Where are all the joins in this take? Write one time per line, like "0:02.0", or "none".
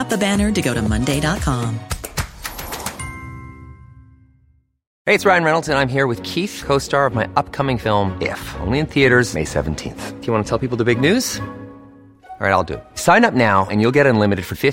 0:04.9